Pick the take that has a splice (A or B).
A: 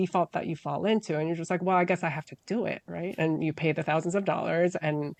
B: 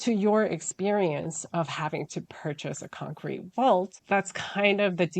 B